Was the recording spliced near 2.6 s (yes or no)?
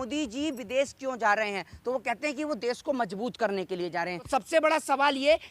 no